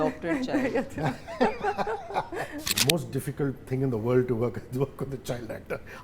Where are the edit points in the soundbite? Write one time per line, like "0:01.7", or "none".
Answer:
0:02.8